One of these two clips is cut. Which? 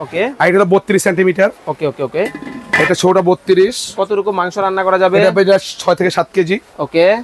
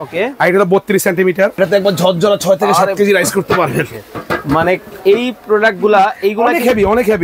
second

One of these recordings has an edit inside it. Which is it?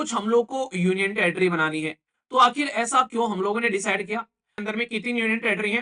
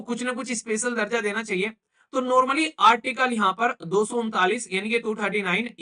first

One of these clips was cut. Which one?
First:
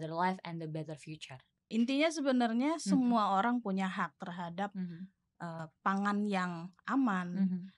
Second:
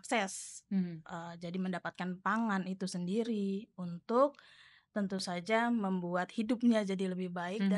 first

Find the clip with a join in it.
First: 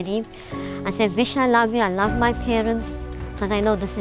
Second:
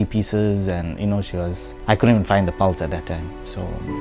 second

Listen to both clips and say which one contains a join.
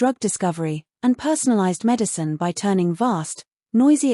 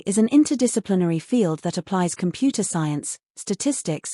second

